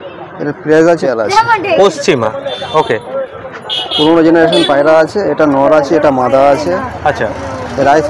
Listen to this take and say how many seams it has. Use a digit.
1